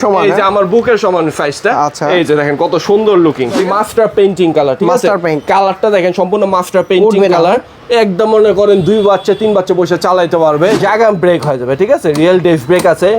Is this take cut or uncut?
cut